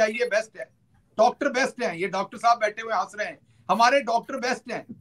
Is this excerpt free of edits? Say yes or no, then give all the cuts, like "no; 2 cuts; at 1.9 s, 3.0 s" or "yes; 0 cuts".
no; 1 cut; at 1.1 s